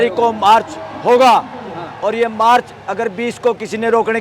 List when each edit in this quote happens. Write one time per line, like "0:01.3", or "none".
none